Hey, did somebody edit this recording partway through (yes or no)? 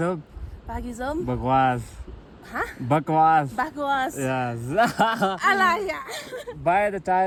no